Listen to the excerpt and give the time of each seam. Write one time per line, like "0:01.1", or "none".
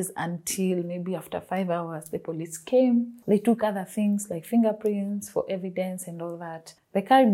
none